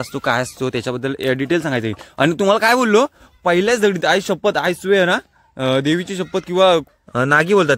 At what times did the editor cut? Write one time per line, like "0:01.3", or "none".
0:06.9

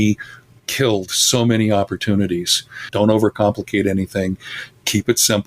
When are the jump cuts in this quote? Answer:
0:02.8

